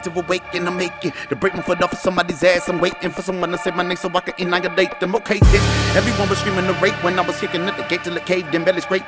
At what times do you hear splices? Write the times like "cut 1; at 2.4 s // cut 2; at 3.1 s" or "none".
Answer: none